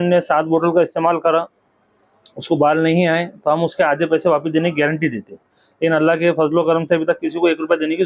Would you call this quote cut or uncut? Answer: uncut